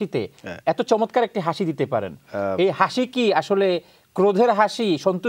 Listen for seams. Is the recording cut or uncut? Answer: uncut